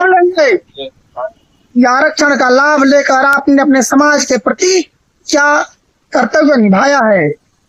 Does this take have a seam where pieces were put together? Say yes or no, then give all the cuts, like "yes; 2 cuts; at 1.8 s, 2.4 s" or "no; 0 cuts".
no; 0 cuts